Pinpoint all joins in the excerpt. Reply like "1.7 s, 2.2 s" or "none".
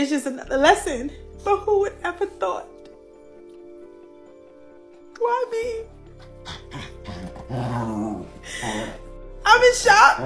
2.7 s, 5.0 s